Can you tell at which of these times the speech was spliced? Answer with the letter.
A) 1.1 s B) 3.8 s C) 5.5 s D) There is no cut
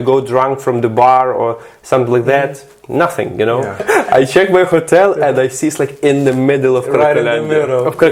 B